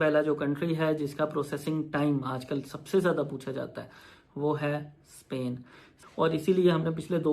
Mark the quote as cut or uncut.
cut